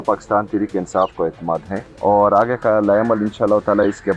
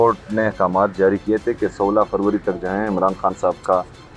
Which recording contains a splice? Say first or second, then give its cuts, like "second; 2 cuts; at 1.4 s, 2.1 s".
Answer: first; 1 cut; at 1.8 s